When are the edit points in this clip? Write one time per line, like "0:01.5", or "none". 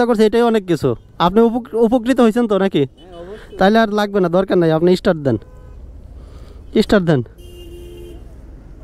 none